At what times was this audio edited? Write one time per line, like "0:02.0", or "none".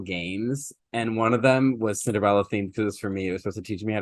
none